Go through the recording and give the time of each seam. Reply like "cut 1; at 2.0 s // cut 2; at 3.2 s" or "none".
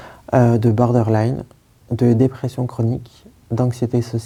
none